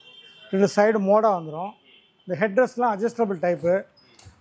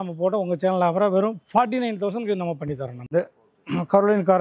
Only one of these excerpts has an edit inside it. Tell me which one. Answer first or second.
second